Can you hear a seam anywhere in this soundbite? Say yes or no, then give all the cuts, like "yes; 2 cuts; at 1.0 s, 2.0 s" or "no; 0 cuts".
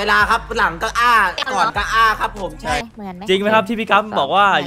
yes; 1 cut; at 2.9 s